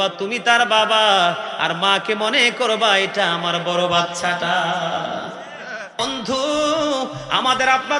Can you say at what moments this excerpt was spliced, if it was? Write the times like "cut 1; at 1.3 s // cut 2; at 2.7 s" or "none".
cut 1; at 6.0 s